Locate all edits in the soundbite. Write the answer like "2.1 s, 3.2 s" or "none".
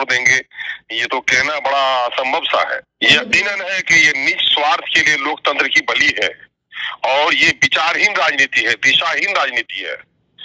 3.0 s

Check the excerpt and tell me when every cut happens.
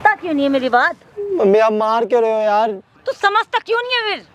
none

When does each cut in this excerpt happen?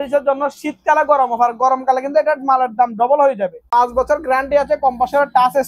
3.7 s

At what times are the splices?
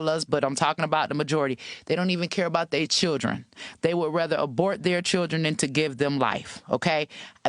6.5 s

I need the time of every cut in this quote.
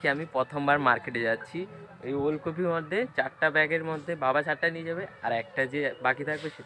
none

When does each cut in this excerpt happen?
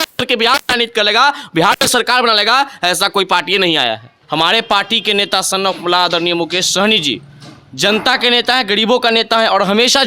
4.1 s

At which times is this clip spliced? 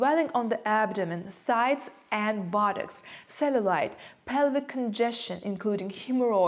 none

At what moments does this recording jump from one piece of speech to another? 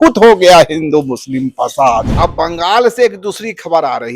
2.1 s

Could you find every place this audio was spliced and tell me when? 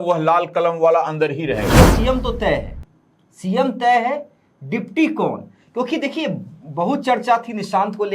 1.7 s

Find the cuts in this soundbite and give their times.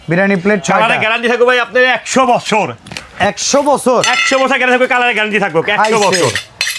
none

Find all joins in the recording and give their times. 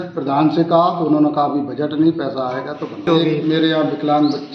3.1 s

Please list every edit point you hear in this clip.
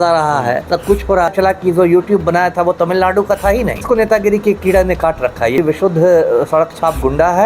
1.3 s, 3.8 s, 5.6 s

